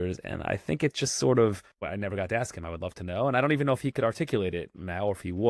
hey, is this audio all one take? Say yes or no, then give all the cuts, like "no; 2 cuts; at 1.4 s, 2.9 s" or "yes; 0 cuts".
no; 1 cut; at 1.8 s